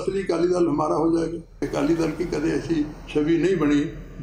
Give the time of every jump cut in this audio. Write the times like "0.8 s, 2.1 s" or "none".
1.6 s